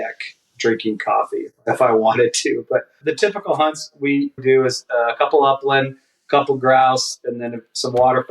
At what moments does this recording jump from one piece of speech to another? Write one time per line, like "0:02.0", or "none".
0:01.6
0:03.0
0:04.4